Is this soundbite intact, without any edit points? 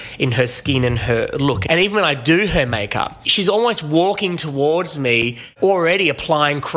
no; 3 cuts; at 1.6 s, 3.2 s, 5.5 s

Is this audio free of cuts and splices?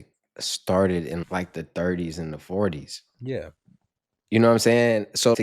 yes; 0 cuts

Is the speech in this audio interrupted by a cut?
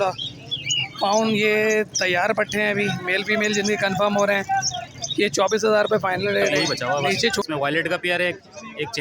yes; 1 cut; at 7.4 s

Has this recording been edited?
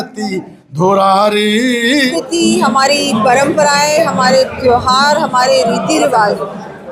yes; 1 cut; at 2.1 s

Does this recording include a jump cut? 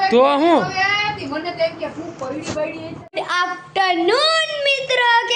yes; 1 cut; at 3.1 s

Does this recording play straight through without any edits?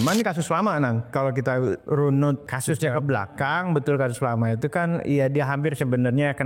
no; 2 cuts; at 1.1 s, 2.5 s

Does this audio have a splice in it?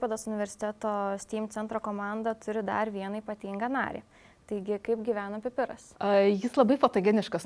yes; 1 cut; at 5.8 s

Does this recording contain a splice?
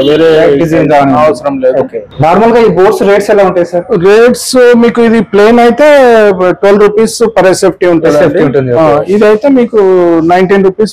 no; 0 cuts

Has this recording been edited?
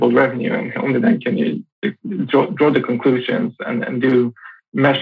no; 0 cuts

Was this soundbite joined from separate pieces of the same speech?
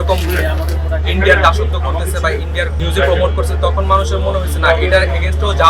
yes; 1 cut; at 2.8 s

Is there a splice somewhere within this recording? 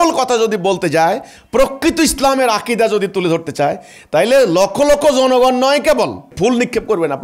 yes; 1 cut; at 6.3 s

